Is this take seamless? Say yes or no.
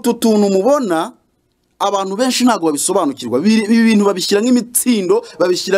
yes